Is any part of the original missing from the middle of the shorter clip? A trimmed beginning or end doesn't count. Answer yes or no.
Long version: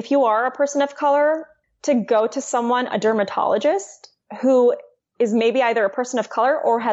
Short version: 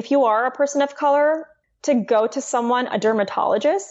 no